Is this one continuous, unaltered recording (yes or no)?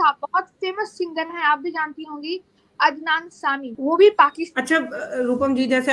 no